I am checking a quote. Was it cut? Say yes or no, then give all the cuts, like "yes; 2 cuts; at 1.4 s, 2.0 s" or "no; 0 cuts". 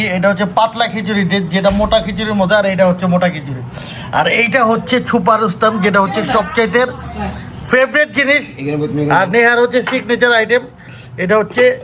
no; 0 cuts